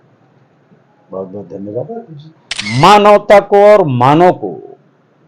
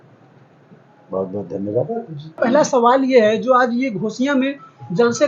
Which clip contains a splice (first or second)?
first